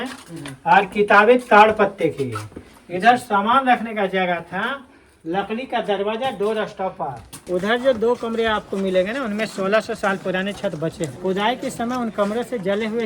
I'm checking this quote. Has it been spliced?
yes; 2 cuts; at 7.5 s, 11.2 s

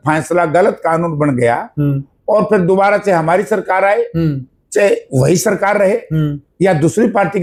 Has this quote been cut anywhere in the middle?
no; 0 cuts

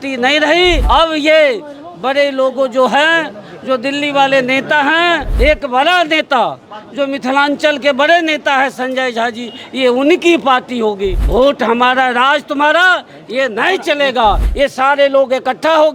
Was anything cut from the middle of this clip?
yes; 4 cuts; at 0.8 s, 5.3 s, 11.2 s, 14.5 s

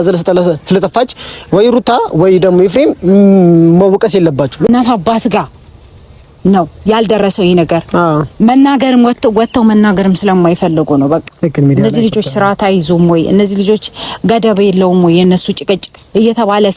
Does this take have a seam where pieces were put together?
yes; 1 cut; at 4.7 s

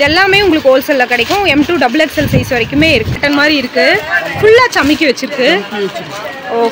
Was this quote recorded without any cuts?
no; 1 cut; at 3.2 s

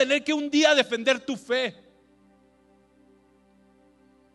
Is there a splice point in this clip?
no; 0 cuts

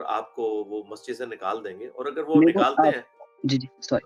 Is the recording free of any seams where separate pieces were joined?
yes; 0 cuts

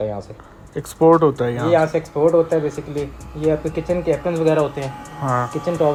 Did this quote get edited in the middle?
no; 0 cuts

